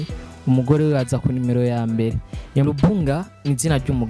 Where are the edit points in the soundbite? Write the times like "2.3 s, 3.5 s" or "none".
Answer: 2.6 s